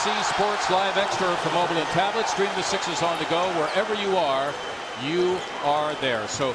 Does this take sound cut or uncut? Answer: uncut